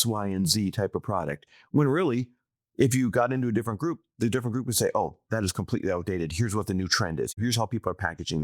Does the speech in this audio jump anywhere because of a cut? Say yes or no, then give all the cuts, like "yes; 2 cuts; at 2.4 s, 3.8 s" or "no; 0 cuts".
yes; 1 cut; at 7.4 s